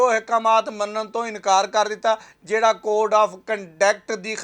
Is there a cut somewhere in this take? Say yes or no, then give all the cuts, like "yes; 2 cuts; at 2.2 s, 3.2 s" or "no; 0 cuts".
no; 0 cuts